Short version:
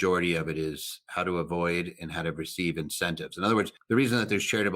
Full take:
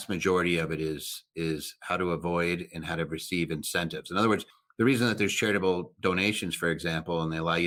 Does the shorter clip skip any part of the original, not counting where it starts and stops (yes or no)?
yes